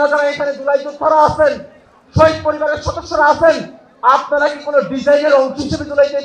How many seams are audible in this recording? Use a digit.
0